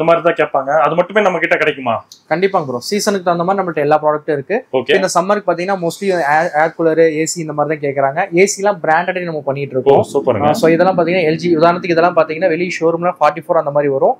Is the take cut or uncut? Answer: uncut